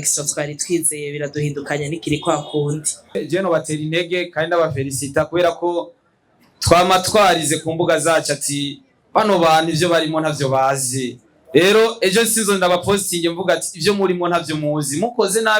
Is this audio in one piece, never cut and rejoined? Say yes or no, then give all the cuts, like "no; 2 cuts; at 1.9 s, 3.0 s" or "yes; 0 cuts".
no; 1 cut; at 3.2 s